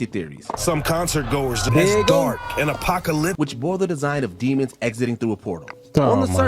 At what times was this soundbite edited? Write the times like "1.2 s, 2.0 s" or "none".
1.7 s, 3.3 s